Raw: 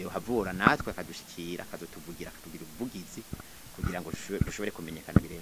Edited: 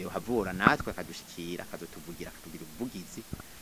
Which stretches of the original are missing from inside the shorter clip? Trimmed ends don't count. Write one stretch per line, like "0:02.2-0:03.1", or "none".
none